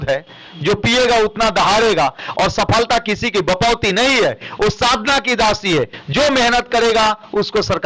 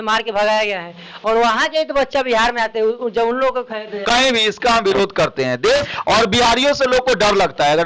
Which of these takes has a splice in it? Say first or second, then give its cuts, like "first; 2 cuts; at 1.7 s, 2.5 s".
second; 1 cut; at 5.9 s